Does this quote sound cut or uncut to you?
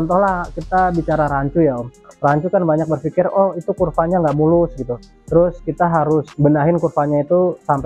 uncut